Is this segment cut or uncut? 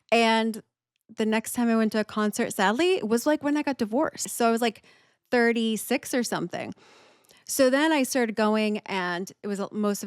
cut